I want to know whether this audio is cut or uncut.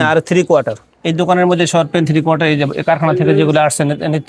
uncut